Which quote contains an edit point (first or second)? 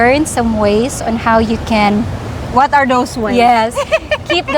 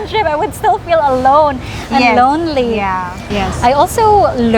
second